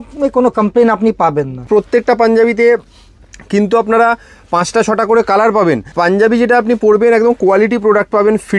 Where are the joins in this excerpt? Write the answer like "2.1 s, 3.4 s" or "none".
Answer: 1.7 s, 5.9 s